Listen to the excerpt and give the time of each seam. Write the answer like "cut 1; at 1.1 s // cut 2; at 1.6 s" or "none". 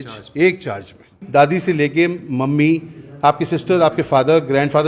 cut 1; at 1.2 s